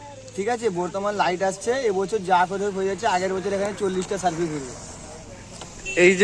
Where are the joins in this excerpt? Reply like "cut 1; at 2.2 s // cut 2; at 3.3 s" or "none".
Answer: none